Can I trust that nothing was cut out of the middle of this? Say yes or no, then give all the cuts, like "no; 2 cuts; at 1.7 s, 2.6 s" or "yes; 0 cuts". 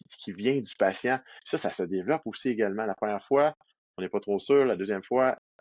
no; 1 cut; at 1.3 s